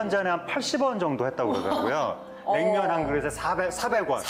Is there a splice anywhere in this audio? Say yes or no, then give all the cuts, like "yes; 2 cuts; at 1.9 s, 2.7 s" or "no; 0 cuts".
no; 0 cuts